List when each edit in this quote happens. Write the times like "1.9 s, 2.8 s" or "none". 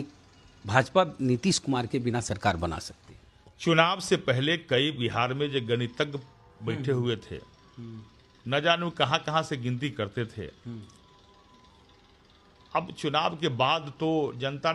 none